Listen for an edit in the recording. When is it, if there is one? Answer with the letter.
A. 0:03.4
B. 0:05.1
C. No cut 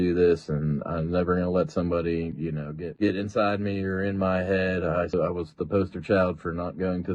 B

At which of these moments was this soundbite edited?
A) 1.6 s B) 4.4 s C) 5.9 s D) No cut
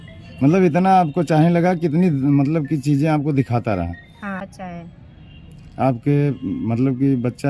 B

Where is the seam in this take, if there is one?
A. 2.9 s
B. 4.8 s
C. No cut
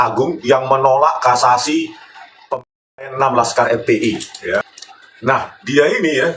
B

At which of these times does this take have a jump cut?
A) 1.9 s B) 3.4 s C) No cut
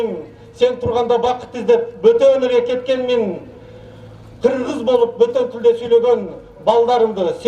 C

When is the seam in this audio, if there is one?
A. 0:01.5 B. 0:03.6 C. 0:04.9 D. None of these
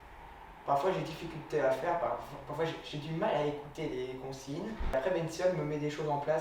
C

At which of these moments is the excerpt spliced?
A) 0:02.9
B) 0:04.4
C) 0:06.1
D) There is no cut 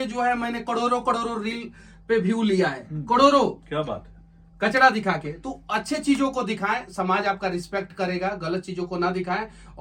D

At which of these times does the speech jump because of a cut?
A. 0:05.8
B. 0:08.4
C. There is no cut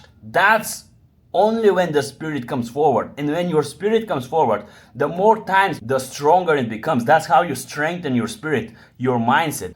A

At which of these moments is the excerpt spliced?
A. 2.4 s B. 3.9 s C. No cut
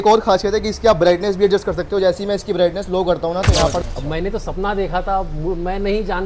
B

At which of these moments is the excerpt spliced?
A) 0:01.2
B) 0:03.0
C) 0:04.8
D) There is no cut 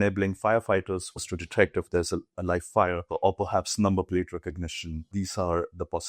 A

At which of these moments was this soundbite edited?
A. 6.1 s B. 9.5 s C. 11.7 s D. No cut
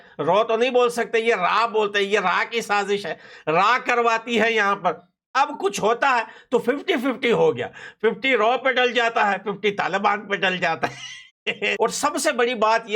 C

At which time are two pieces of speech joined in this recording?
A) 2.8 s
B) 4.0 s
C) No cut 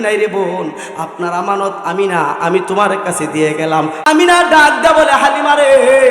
B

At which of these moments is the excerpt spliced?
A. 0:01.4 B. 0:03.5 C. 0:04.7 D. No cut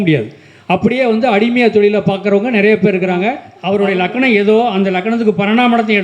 B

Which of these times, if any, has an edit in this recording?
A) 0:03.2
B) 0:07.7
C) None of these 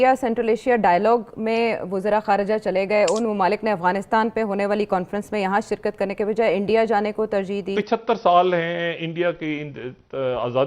B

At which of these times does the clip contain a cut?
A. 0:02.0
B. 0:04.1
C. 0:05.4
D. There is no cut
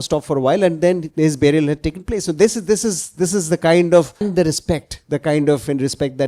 B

